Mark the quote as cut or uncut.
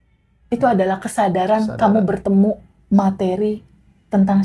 uncut